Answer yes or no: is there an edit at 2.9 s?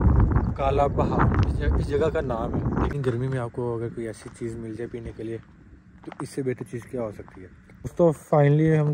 yes